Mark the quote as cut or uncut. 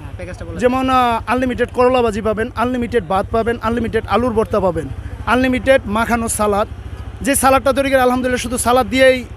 uncut